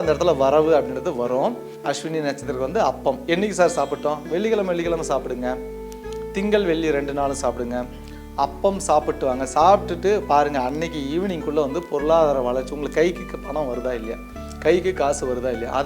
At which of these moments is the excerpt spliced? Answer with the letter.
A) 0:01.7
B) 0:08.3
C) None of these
A